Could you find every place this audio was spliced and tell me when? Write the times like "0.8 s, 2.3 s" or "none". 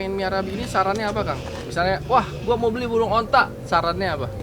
none